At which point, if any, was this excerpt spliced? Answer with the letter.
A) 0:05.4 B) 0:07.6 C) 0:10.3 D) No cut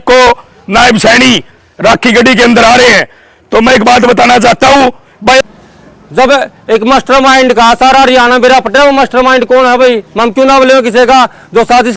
A